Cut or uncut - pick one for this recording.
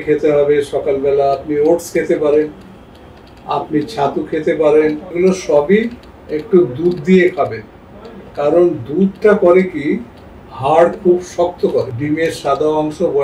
cut